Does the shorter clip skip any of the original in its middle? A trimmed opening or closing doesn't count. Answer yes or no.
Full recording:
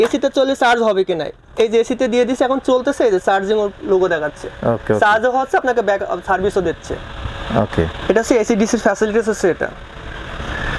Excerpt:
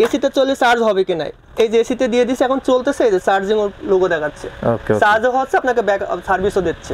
no